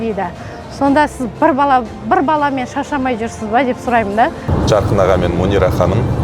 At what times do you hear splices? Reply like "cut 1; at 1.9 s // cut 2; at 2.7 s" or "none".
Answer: cut 1; at 4.5 s